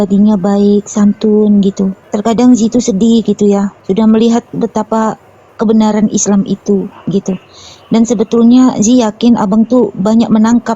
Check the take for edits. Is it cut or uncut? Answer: cut